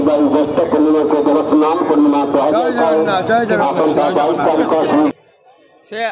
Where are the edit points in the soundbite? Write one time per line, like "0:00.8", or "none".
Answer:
0:05.1